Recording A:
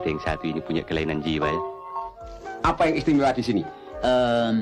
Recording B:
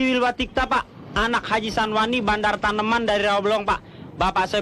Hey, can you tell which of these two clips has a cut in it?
A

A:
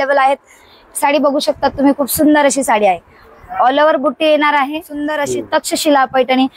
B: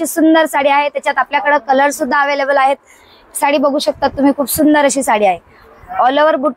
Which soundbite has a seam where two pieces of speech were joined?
A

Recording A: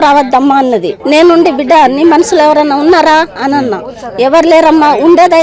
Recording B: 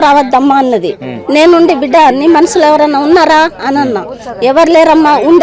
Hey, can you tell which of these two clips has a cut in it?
A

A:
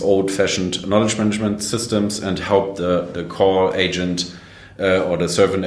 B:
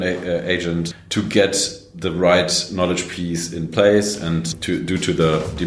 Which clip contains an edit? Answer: B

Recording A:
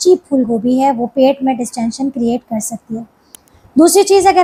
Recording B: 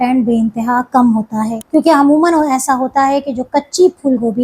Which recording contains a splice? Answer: B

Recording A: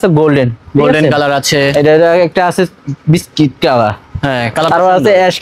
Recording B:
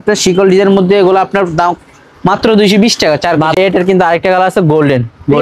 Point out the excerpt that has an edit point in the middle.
B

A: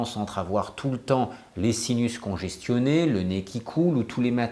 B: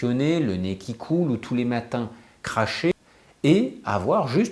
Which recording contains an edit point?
B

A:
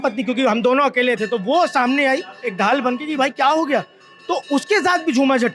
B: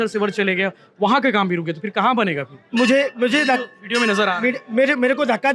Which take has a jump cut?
B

